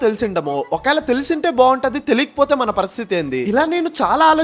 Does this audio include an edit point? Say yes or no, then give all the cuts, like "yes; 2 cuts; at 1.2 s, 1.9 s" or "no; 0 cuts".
no; 0 cuts